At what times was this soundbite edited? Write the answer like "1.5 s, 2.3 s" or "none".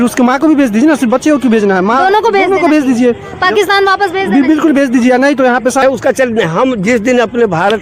5.8 s